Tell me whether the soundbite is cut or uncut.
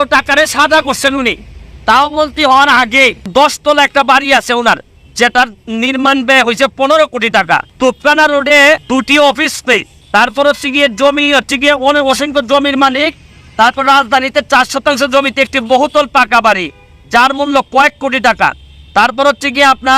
cut